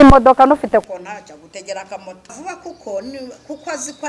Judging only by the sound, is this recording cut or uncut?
cut